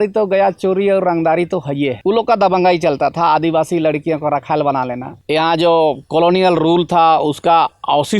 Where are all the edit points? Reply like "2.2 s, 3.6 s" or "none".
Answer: 2.0 s, 5.2 s